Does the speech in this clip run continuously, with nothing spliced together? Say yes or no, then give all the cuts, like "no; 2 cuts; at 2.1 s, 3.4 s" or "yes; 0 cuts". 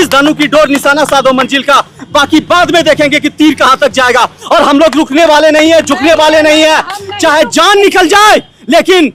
yes; 0 cuts